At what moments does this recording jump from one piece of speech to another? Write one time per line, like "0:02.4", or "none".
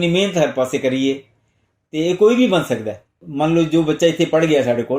0:03.2